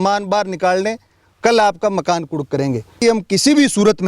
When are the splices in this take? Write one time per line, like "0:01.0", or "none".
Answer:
0:03.0

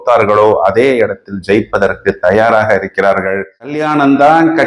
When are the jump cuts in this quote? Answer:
0:03.8

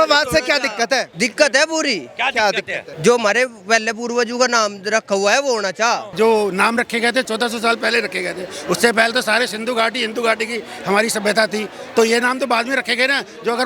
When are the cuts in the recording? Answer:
0:01.1
0:02.8
0:06.1
0:07.3

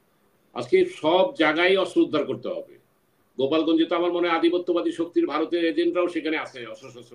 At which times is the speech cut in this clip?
none

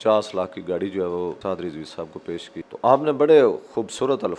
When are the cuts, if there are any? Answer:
0:01.4
0:02.6

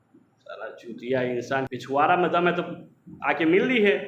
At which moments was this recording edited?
0:01.7

